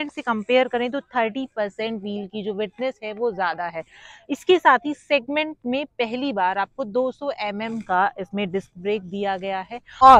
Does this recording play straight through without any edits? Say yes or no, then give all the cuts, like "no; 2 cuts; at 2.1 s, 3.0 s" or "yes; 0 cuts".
yes; 0 cuts